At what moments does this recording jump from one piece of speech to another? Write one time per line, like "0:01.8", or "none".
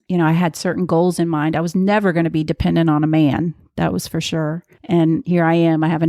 0:04.7

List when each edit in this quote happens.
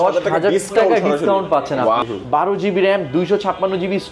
0:02.0

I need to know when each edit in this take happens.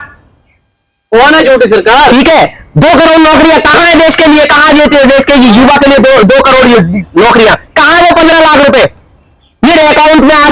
none

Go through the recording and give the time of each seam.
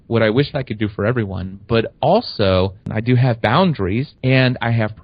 0:02.9
0:04.1

